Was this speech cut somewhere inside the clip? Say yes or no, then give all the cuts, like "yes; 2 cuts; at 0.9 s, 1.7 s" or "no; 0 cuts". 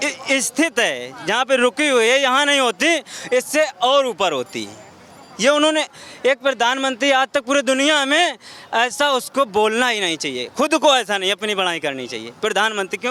no; 0 cuts